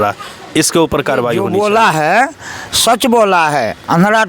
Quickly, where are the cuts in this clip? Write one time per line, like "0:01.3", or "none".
0:01.4